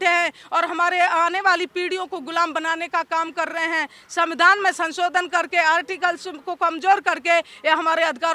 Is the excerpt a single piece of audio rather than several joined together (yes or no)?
yes